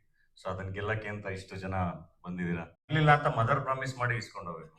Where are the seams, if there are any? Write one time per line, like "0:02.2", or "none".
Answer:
0:02.9